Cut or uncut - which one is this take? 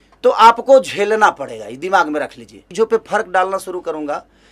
cut